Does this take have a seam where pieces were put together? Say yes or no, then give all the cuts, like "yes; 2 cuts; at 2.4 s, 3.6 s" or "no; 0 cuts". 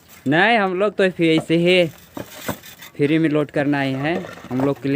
no; 0 cuts